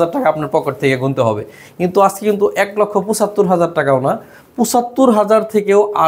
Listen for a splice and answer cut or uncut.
uncut